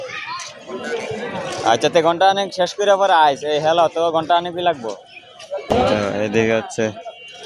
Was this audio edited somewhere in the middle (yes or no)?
yes